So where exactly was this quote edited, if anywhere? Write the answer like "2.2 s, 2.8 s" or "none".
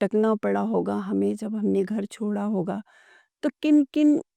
none